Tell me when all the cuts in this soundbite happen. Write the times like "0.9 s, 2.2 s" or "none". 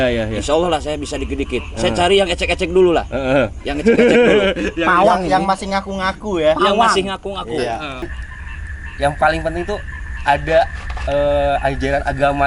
8.1 s